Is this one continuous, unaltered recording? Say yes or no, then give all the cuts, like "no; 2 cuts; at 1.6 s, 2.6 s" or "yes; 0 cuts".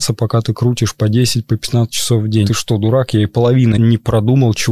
no; 1 cut; at 2.5 s